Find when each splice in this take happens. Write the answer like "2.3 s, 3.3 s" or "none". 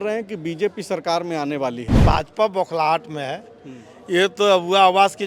2.0 s